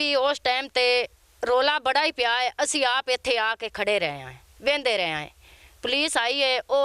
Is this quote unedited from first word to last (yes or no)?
yes